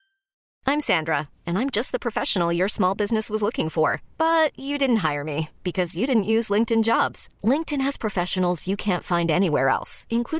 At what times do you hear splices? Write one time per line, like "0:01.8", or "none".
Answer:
none